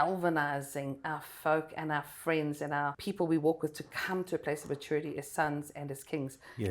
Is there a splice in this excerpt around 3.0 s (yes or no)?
yes